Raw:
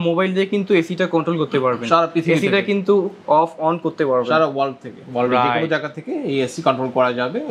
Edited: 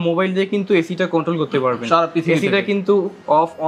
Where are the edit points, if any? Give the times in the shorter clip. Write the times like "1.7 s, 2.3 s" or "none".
none